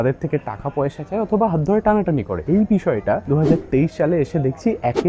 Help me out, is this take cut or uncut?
uncut